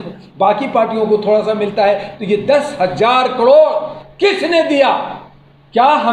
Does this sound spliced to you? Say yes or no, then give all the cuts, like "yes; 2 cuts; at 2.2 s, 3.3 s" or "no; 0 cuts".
no; 0 cuts